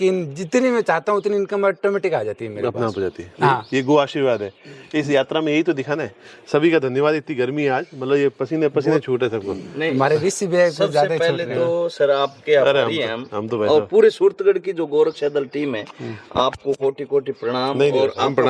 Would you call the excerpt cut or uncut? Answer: uncut